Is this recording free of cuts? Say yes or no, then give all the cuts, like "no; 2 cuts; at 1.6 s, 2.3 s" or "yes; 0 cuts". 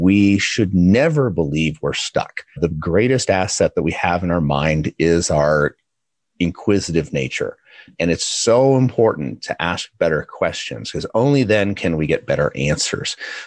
no; 2 cuts; at 2.6 s, 7.9 s